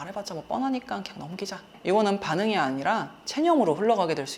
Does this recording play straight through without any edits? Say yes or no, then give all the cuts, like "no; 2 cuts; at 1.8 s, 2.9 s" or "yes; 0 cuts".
no; 1 cut; at 1.7 s